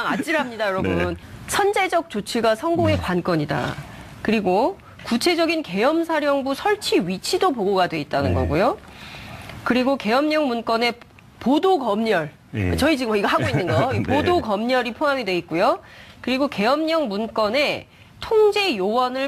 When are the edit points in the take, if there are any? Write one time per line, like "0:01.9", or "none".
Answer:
0:01.2